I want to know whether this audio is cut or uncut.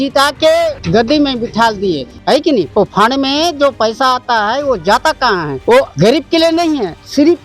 uncut